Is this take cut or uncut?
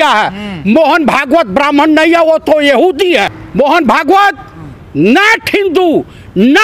cut